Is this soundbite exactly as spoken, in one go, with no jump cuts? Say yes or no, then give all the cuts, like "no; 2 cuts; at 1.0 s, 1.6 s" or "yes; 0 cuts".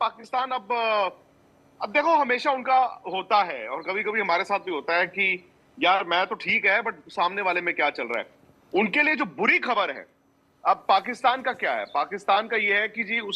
yes; 0 cuts